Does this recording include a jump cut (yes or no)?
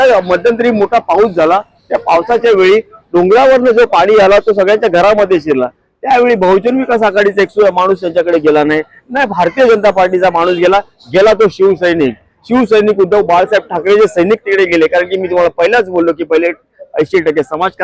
no